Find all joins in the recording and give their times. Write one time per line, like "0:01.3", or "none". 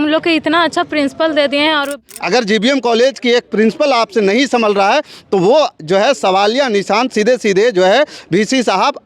0:01.9